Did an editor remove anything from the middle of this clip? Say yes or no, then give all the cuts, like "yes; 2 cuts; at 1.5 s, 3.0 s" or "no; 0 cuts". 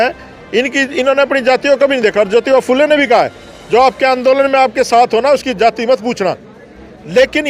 no; 0 cuts